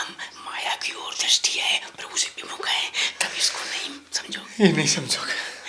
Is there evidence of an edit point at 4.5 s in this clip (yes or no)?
no